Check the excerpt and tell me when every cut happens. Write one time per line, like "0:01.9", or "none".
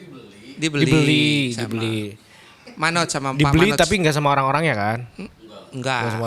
none

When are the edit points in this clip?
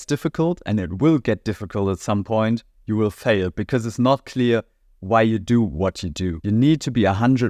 0:06.3

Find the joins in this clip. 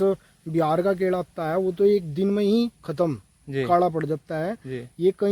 none

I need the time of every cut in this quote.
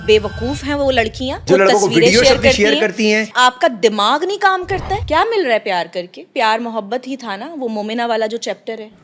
0:01.4
0:03.3
0:05.0
0:06.2

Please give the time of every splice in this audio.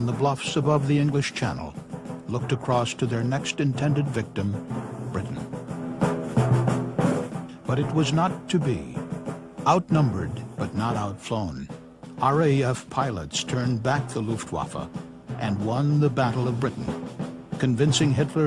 0:10.3

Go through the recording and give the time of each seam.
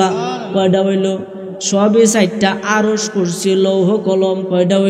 none

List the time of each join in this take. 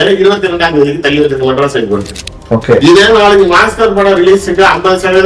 0:02.1

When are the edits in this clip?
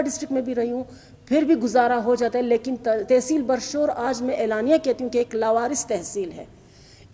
none

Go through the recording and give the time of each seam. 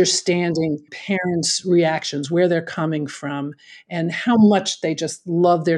0:01.0

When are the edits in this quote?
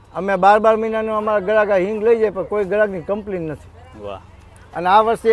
none

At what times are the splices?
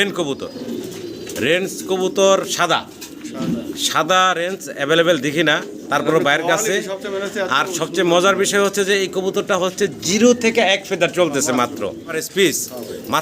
0:12.2

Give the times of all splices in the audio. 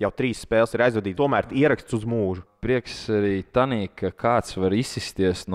0:01.1
0:02.5

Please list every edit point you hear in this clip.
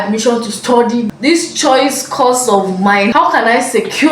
0:01.1
0:03.1

